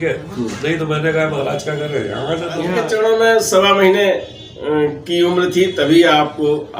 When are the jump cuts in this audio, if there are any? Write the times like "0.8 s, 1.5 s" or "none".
2.7 s

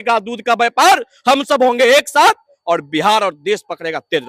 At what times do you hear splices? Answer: none

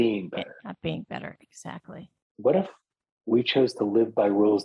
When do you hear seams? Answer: 2.2 s

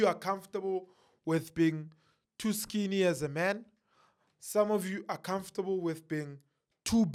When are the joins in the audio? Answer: none

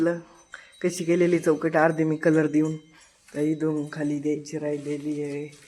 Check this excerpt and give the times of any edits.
none

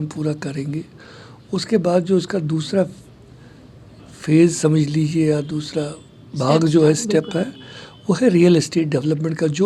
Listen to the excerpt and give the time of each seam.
none

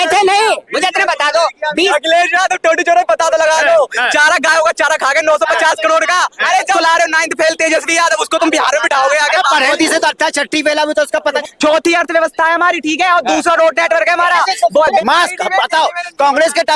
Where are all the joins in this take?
1.9 s, 6.7 s, 9.7 s, 11.4 s, 15.0 s

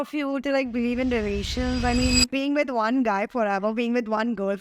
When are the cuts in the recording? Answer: 2.3 s

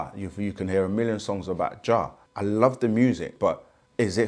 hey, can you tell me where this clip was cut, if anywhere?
2.2 s, 3.3 s

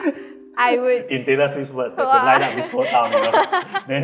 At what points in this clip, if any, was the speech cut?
none

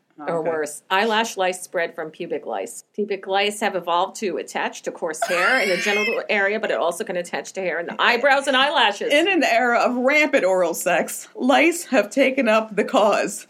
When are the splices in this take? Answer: 2.8 s

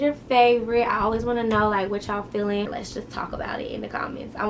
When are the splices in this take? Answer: 2.7 s

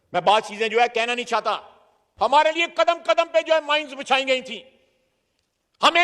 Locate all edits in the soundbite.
2.0 s

